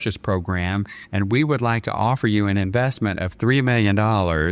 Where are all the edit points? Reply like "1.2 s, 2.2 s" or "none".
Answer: none